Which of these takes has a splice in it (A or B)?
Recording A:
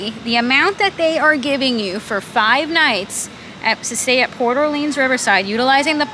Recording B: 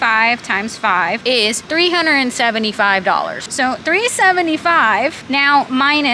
B